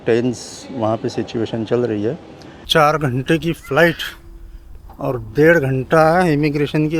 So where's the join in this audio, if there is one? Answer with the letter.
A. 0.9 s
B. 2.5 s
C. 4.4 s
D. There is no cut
B